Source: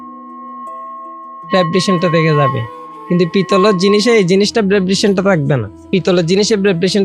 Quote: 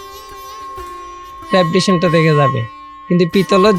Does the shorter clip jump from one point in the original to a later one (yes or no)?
no